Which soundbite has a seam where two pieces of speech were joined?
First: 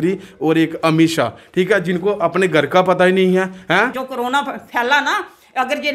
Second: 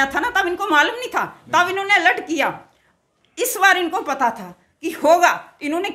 first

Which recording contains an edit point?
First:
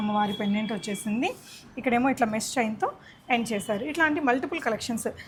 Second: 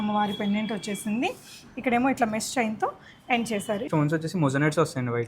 second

